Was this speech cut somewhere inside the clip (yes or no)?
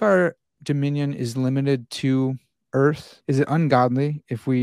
yes